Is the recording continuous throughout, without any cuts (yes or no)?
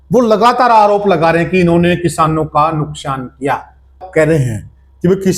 no